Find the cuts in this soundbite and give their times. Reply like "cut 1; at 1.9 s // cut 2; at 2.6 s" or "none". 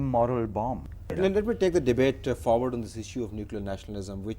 cut 1; at 2.4 s